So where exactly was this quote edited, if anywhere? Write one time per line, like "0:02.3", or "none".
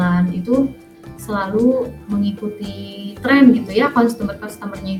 none